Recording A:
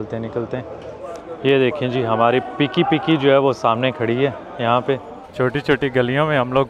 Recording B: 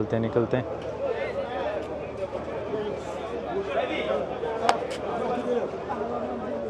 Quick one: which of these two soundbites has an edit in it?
A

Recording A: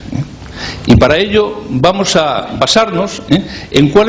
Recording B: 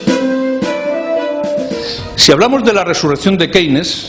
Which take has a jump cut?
B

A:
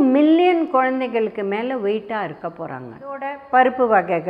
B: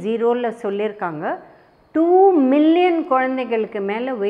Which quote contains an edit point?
A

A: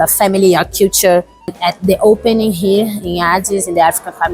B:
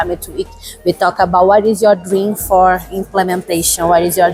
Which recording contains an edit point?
A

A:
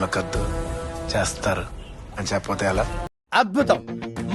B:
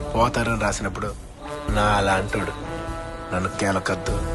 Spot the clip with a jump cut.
A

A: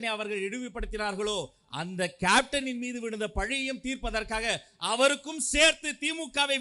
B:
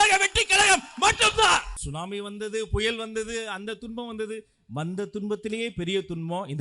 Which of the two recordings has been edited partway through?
B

